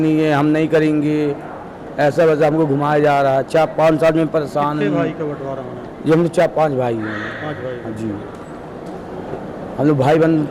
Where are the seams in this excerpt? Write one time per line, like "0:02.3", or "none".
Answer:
none

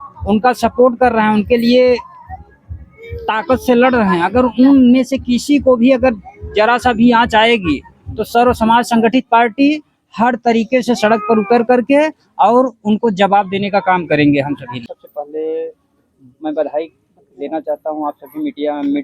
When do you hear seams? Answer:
0:15.0

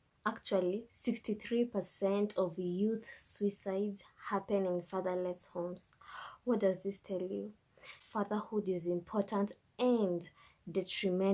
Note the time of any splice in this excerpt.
0:06.1

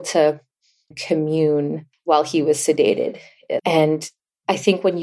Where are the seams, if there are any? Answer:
0:00.9
0:01.9
0:03.6

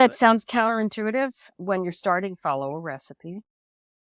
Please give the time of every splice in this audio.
0:01.5

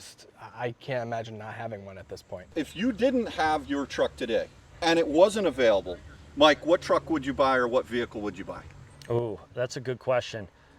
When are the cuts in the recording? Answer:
0:02.5

